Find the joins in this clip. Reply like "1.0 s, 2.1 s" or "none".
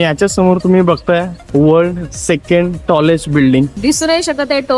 1.4 s, 3.8 s